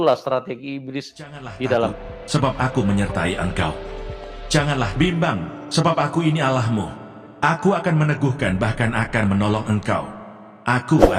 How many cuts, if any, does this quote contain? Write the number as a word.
one